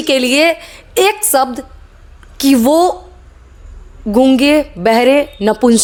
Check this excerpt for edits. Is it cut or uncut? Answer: uncut